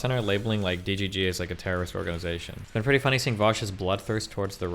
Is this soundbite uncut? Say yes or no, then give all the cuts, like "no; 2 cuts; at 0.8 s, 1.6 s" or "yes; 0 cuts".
no; 1 cut; at 2.5 s